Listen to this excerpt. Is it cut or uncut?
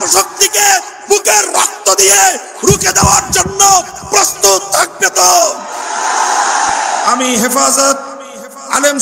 cut